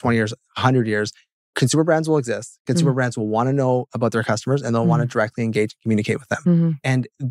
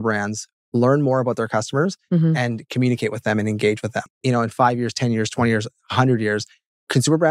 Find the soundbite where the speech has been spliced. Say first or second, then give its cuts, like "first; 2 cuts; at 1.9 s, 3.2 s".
second; 1 cut; at 4.0 s